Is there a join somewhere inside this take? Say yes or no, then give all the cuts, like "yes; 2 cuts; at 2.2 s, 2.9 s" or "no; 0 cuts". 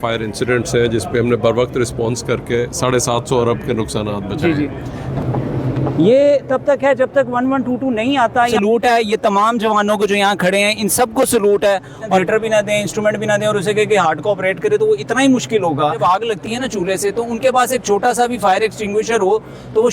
yes; 4 cuts; at 5.1 s, 8.5 s, 12.2 s, 16.0 s